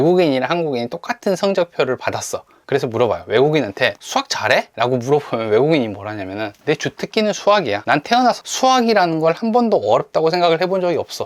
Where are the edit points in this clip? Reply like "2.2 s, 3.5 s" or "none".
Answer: 4.3 s, 6.5 s, 8.1 s